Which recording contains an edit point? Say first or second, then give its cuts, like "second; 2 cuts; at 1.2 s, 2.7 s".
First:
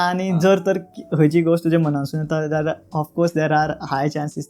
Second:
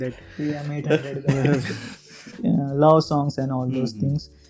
second; 1 cut; at 2.3 s